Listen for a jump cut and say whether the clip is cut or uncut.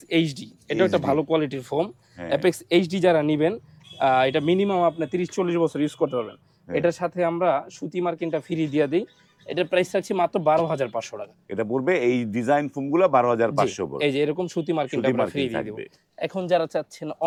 uncut